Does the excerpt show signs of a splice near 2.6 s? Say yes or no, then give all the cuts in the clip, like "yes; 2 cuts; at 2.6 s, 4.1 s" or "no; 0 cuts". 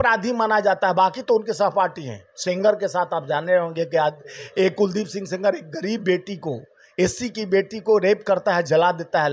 no; 0 cuts